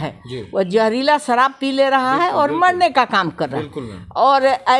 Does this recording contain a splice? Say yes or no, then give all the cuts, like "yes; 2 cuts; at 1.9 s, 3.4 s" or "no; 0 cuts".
no; 0 cuts